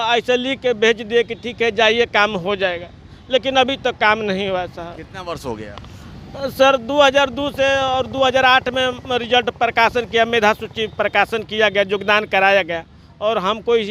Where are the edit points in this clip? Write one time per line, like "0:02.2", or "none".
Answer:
none

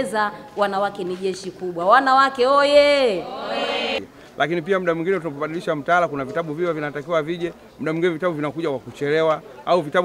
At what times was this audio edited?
0:04.0

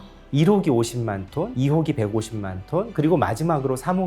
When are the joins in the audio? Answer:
0:01.5

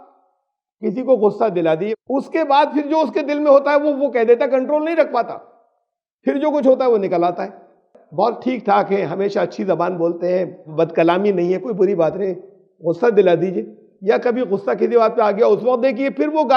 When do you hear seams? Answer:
0:01.9

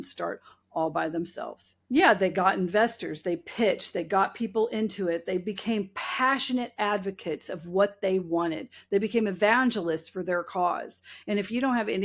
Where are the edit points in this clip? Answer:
0:01.7

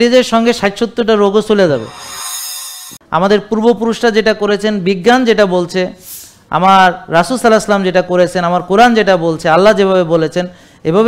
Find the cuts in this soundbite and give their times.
0:02.5

